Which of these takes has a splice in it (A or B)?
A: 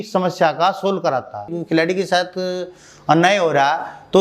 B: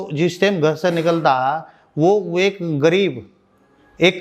A